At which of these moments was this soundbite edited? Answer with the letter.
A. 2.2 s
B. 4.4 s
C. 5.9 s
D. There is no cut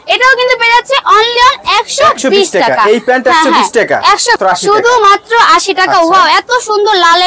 B